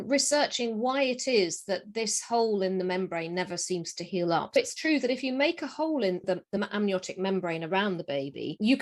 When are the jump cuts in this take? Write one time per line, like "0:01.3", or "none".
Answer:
0:04.6
0:06.2